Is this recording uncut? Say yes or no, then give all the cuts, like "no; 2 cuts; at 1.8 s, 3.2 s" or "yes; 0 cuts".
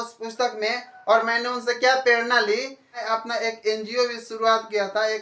no; 1 cut; at 3.0 s